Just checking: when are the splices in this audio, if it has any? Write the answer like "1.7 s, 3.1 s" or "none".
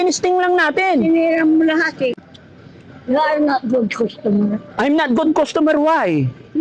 2.3 s